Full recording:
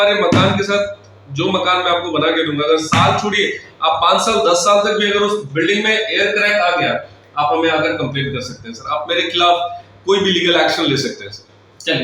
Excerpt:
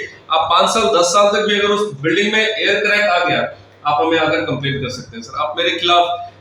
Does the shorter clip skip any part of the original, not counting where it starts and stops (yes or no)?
no